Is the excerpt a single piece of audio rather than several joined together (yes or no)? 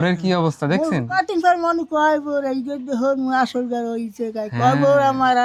yes